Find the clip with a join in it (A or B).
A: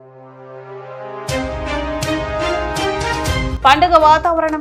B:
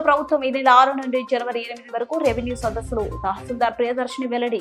A